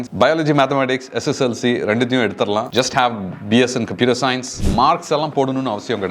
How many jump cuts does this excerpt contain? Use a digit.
1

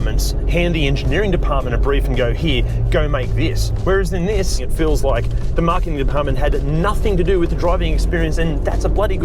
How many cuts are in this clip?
2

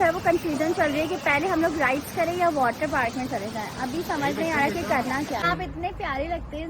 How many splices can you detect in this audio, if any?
1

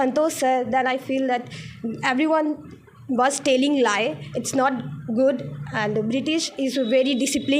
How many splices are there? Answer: 0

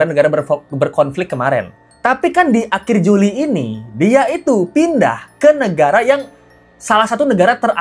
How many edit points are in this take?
0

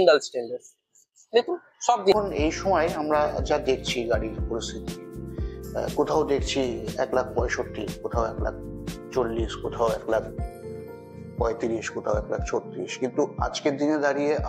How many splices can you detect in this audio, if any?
1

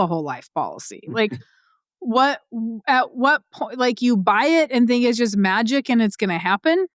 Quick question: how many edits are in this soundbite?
0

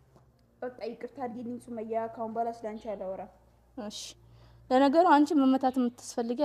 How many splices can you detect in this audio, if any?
0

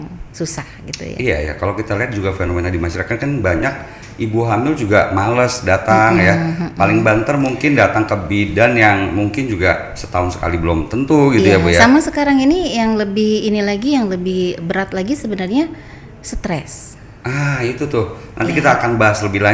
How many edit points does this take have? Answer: 0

